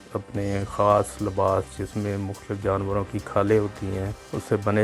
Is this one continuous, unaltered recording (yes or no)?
yes